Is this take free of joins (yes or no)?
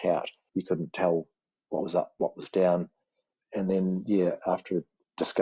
yes